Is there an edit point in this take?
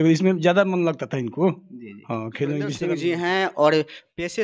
yes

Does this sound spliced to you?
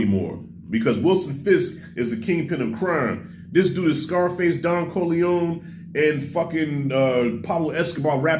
no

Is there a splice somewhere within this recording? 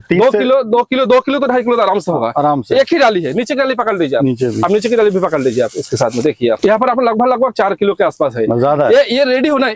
no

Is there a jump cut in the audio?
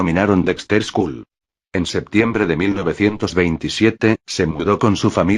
yes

